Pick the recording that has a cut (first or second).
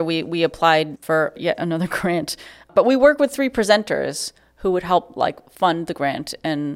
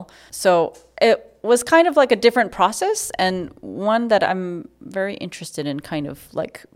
first